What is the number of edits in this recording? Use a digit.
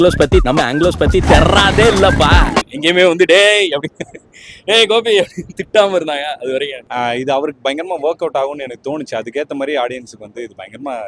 2